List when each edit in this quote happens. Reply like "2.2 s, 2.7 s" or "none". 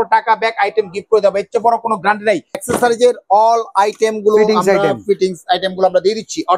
2.6 s